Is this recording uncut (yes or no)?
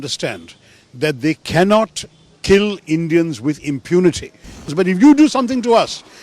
no